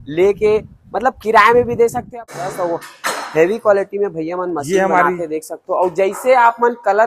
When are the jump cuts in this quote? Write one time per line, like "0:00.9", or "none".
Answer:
0:02.4